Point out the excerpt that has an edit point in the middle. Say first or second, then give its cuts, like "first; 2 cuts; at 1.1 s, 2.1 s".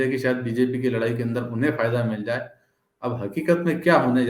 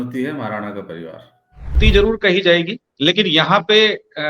second; 1 cut; at 1.8 s